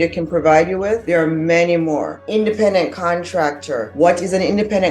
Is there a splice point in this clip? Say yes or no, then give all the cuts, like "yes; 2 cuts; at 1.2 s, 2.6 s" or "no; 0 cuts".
yes; 3 cuts; at 1.0 s, 2.2 s, 3.9 s